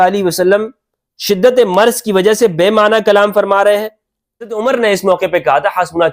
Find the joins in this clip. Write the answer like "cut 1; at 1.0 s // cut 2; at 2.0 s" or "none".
cut 1; at 4.5 s